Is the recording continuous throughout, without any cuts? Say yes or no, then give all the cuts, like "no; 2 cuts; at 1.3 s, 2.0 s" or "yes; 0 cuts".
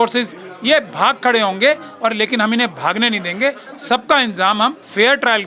yes; 0 cuts